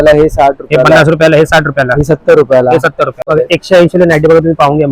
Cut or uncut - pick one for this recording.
cut